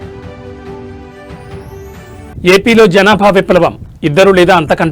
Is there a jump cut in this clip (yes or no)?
yes